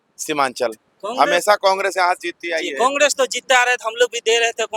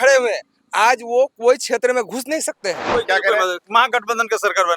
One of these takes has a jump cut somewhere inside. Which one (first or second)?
second